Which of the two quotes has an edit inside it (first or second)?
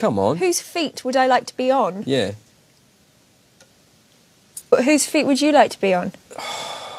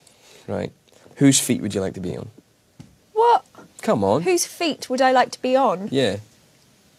first